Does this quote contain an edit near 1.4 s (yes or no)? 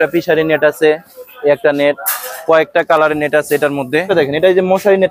no